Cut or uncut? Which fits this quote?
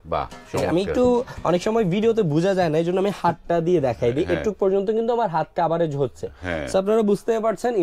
uncut